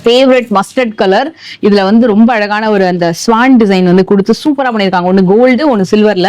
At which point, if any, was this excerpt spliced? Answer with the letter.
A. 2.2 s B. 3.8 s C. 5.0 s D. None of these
D